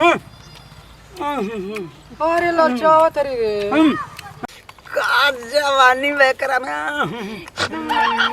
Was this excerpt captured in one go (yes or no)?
no